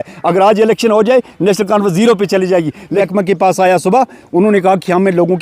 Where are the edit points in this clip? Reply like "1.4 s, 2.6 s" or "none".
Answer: 3.0 s